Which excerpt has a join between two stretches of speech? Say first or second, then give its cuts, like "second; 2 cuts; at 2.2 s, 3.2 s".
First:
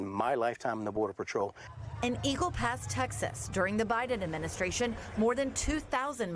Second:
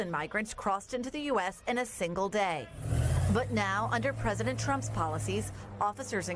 first; 1 cut; at 1.9 s